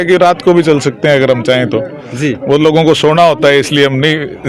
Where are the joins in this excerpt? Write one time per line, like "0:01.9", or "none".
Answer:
none